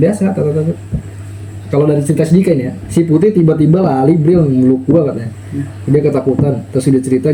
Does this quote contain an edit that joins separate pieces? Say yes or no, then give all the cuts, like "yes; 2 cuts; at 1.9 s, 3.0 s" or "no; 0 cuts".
no; 0 cuts